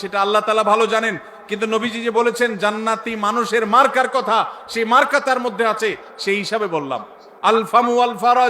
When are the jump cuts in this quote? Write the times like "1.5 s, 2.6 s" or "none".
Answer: 7.2 s